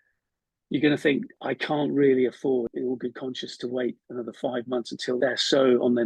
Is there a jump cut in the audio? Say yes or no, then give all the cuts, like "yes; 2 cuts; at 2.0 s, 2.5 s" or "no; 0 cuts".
yes; 3 cuts; at 1.3 s, 2.7 s, 5.2 s